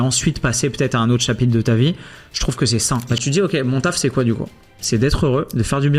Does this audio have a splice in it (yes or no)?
yes